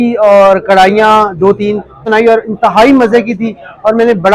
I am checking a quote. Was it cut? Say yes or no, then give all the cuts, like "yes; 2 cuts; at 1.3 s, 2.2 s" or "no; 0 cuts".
yes; 1 cut; at 2.1 s